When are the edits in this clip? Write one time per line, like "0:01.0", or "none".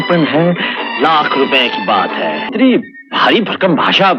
0:02.5